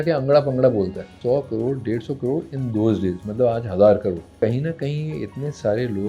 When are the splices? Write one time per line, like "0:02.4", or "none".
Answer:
0:01.1
0:04.3